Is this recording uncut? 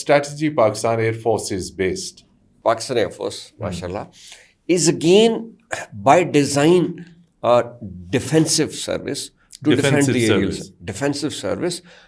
no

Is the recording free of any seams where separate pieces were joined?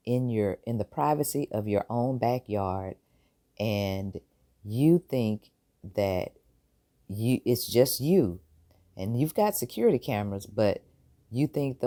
yes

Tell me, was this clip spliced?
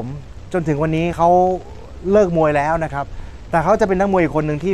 no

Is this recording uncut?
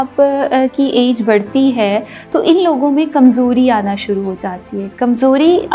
yes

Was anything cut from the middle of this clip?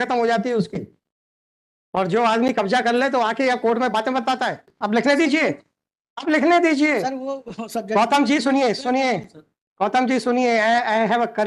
yes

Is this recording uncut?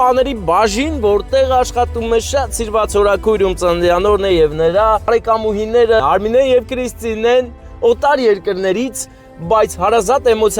no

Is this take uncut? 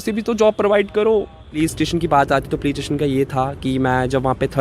no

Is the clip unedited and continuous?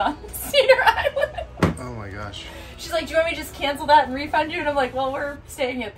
yes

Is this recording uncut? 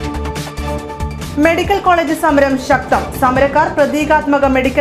yes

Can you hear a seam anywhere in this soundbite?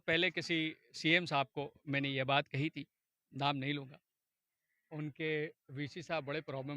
no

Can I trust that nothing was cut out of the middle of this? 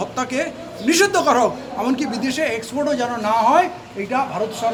yes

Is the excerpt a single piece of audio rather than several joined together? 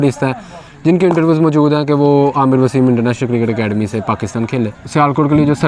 no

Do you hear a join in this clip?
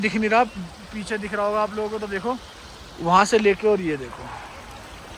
no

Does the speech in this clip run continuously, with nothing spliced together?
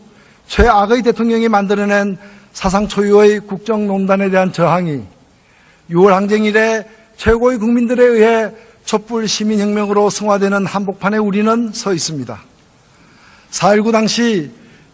no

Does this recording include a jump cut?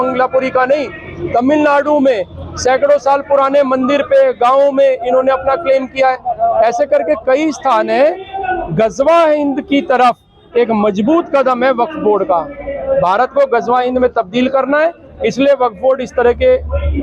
no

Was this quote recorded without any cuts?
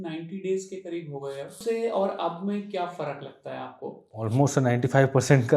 no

